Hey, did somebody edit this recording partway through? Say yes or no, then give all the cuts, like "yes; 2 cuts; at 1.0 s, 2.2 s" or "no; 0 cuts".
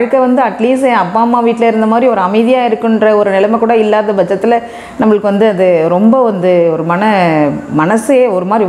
no; 0 cuts